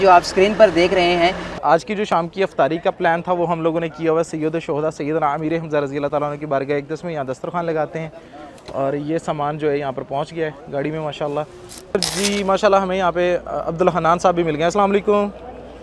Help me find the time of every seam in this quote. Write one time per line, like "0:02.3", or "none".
0:01.6
0:11.9